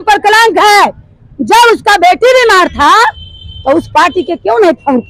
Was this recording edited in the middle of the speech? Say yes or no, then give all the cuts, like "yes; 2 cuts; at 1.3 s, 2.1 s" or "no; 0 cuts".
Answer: no; 0 cuts